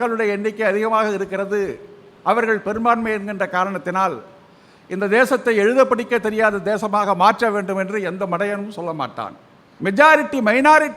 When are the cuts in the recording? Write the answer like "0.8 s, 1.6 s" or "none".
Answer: 9.9 s